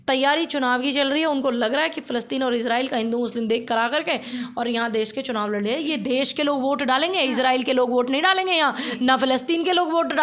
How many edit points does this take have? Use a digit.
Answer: 0